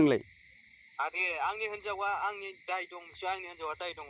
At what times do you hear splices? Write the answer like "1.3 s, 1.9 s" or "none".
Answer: none